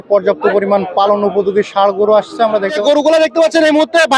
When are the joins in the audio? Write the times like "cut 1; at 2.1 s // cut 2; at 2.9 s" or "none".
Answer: cut 1; at 2.7 s